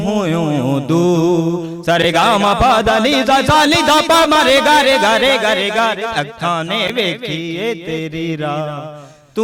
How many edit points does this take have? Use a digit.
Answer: 0